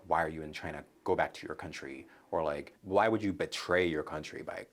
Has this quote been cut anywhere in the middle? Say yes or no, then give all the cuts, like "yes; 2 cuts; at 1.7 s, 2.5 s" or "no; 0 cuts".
yes; 1 cut; at 2.8 s